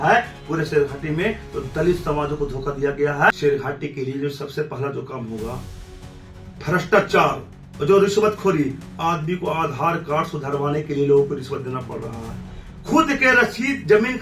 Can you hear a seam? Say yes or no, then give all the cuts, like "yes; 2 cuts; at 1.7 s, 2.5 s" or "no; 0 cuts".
yes; 1 cut; at 3.3 s